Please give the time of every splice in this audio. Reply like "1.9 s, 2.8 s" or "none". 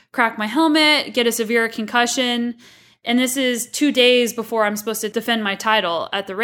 5.0 s